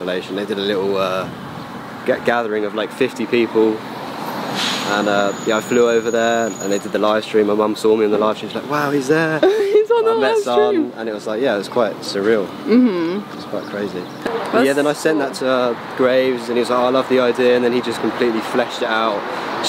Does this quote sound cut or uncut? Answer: cut